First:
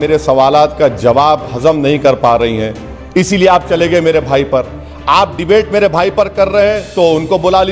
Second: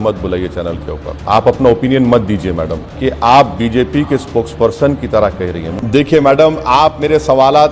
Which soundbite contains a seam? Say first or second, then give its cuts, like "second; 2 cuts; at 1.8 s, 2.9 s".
second; 3 cuts; at 1.2 s, 2.8 s, 5.7 s